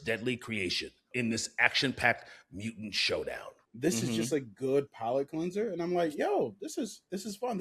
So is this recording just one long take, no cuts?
no; 2 cuts; at 1.1 s, 3.6 s

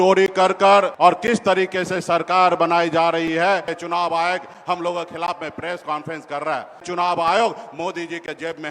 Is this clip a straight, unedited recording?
no; 3 cuts; at 0.9 s, 3.7 s, 6.9 s

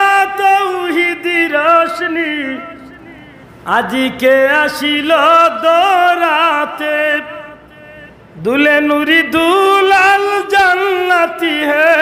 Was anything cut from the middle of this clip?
no; 0 cuts

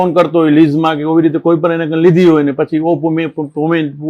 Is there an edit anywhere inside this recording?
no; 0 cuts

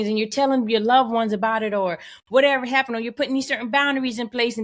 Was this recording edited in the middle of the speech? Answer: no; 0 cuts

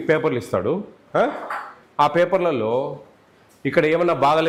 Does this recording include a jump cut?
no; 0 cuts

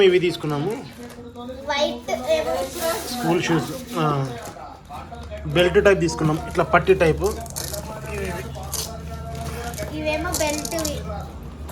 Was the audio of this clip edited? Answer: no; 0 cuts

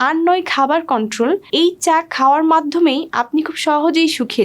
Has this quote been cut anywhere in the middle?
yes; 1 cut; at 1.5 s

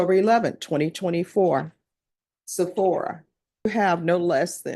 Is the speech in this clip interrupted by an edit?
yes; 1 cut; at 3.7 s

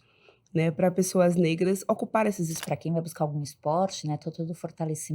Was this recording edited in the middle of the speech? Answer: yes; 1 cut; at 2.6 s

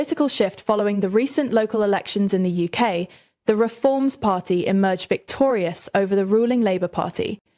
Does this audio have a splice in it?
no; 0 cuts

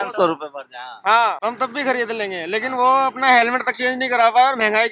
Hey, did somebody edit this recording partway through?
yes; 1 cut; at 1.4 s

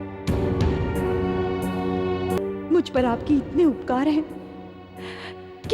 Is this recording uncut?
no; 1 cut; at 2.4 s

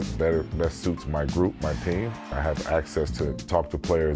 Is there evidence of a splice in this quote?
yes; 1 cut; at 2.5 s

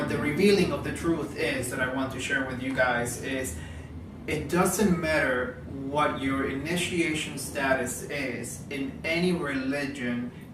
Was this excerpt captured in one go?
no; 1 cut; at 6.1 s

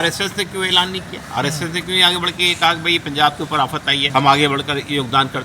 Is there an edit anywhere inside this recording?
yes; 1 cut; at 4.0 s

